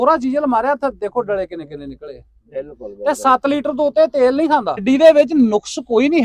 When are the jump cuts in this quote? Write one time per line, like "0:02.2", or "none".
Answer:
0:04.8

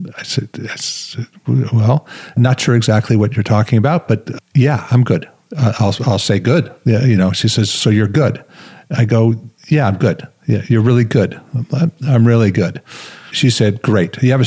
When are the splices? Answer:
0:02.4
0:04.3
0:13.3

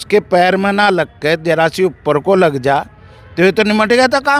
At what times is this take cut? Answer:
none

